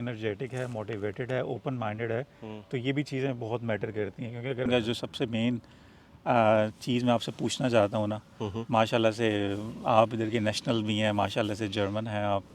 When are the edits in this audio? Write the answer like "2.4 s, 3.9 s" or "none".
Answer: 4.6 s